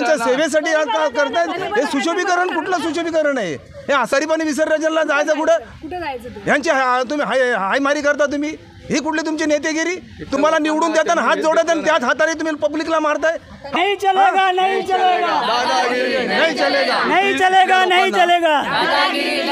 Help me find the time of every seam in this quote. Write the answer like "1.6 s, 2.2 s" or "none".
4.1 s, 13.7 s